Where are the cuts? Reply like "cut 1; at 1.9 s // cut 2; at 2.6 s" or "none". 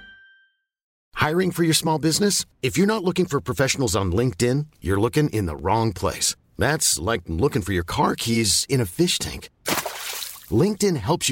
cut 1; at 1.0 s